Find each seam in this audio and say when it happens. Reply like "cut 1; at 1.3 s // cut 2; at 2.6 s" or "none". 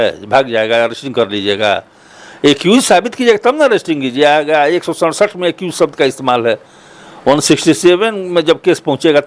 none